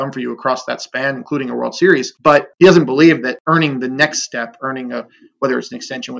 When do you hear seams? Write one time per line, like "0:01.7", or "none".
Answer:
0:02.4
0:03.4